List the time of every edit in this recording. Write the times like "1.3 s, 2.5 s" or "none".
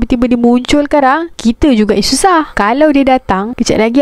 2.5 s